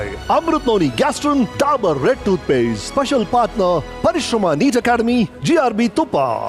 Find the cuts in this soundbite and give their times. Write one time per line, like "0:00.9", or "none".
0:01.5
0:03.9
0:05.4

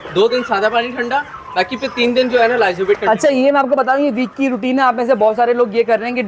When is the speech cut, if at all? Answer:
none

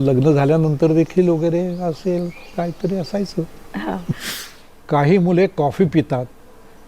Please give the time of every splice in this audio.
0:04.3

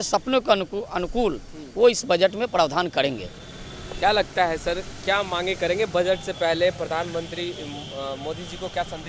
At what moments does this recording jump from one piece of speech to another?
none

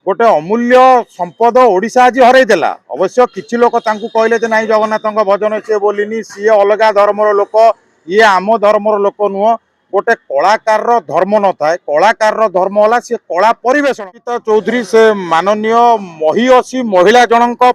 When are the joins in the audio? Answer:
0:14.0

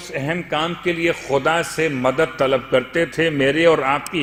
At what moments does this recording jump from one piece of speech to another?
none

